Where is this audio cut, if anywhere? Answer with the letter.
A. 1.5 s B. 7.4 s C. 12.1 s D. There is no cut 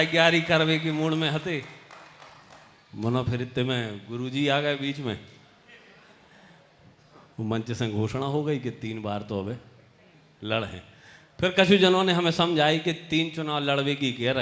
D